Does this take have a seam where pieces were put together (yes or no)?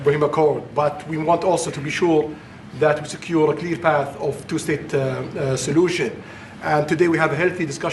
no